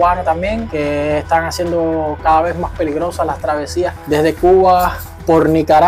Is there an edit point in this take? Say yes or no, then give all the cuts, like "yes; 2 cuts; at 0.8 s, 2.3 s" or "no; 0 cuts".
no; 0 cuts